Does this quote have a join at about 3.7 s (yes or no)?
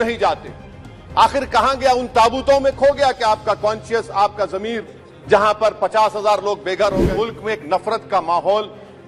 no